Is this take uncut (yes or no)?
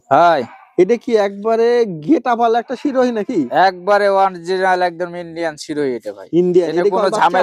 yes